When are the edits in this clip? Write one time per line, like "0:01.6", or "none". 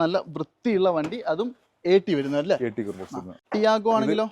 0:03.3